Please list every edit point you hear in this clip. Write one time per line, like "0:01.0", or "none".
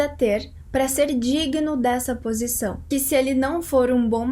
0:02.9